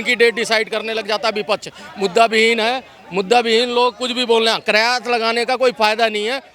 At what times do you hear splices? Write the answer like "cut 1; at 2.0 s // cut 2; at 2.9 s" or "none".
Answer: none